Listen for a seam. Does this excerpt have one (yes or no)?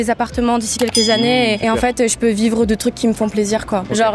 no